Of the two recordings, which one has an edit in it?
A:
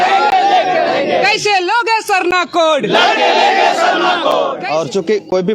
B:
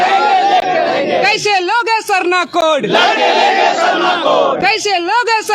A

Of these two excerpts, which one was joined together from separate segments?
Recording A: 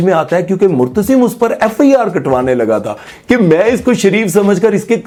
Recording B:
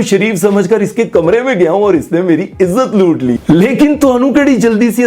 B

